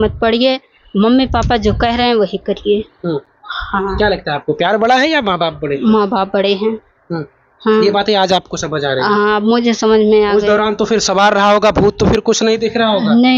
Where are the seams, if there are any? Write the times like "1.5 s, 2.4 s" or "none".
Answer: none